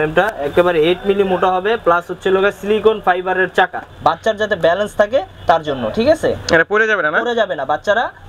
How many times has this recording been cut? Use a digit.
1